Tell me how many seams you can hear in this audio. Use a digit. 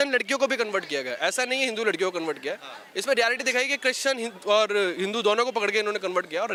0